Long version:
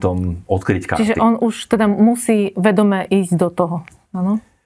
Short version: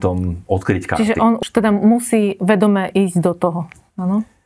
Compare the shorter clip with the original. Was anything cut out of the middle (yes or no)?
yes